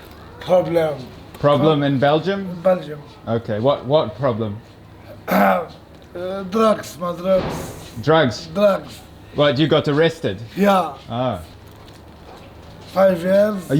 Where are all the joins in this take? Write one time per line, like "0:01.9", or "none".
0:11.5